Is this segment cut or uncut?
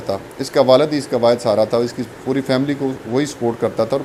uncut